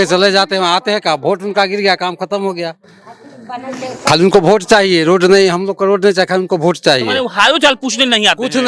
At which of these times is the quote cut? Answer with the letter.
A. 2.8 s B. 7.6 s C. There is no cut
C